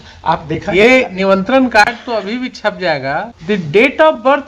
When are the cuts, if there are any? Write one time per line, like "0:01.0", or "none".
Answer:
0:03.3